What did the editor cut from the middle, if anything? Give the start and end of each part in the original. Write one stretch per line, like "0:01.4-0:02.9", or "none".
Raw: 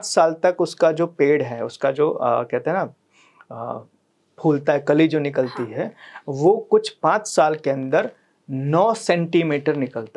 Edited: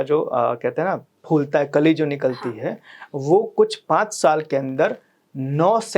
0:03.0-0:04.3